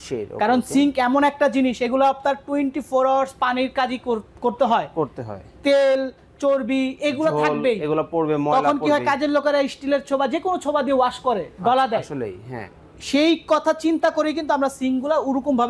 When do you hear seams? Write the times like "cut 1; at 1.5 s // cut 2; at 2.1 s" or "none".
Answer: none